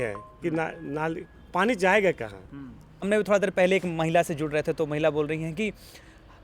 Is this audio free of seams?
no; 1 cut; at 3.1 s

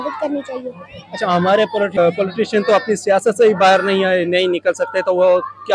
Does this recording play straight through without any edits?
no; 1 cut; at 2.0 s

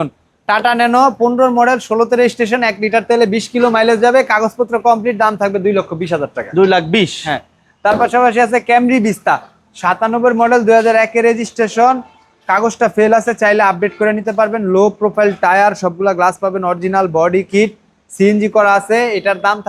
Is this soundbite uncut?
yes; 0 cuts

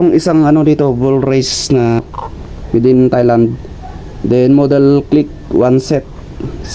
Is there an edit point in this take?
yes; 1 cut; at 2.0 s

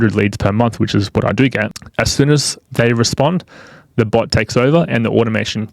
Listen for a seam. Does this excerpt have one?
yes; 1 cut; at 1.8 s

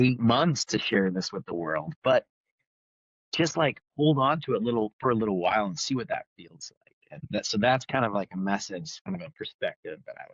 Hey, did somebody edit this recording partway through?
yes; 2 cuts; at 7.3 s, 9.1 s

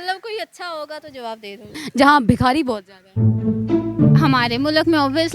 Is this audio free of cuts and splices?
no; 1 cut; at 1.8 s

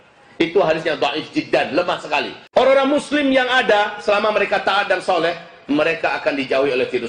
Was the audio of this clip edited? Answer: yes; 1 cut; at 2.4 s

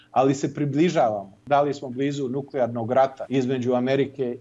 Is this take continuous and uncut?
no; 2 cuts; at 1.4 s, 3.2 s

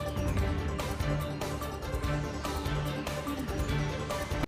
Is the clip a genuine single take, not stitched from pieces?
no; 2 cuts; at 1.5 s, 2.9 s

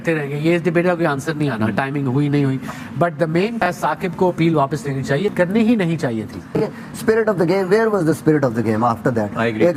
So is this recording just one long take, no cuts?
no; 1 cut; at 6.4 s

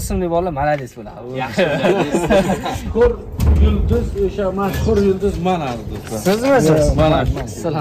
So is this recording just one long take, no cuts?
no; 1 cut; at 2.9 s

